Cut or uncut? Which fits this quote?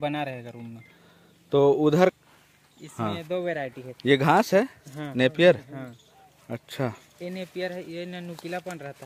cut